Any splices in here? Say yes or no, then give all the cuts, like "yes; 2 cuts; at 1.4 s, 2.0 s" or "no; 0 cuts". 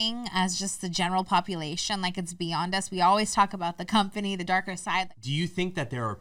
yes; 1 cut; at 5.2 s